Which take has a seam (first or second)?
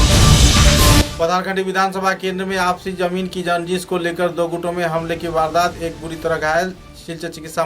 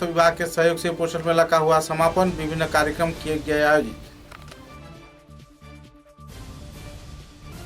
first